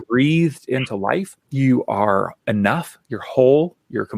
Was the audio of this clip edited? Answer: yes; 1 cut; at 1.4 s

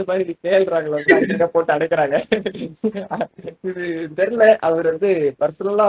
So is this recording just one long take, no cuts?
yes; 0 cuts

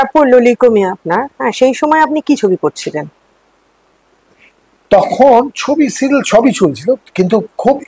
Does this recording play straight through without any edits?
yes; 0 cuts

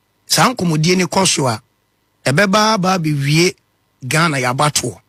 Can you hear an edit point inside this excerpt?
no; 0 cuts

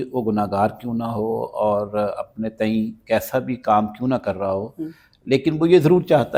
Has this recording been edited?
no; 0 cuts

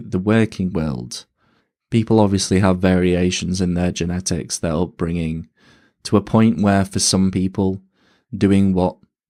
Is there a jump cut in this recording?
no; 0 cuts

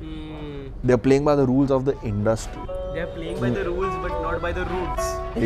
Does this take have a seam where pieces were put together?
no; 0 cuts

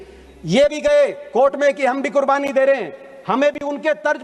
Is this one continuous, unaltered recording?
yes; 0 cuts

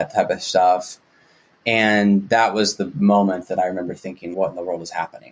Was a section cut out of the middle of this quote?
no; 0 cuts

